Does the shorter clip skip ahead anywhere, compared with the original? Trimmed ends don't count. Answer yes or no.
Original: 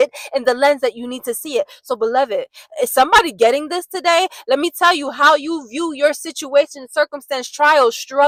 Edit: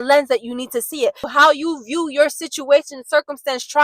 yes